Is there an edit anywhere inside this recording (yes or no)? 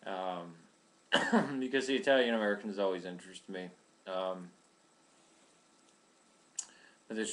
yes